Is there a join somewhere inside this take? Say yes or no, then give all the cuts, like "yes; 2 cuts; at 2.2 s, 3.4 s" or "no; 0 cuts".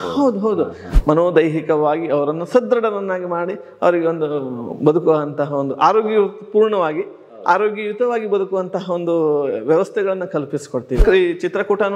yes; 2 cuts; at 0.9 s, 11.0 s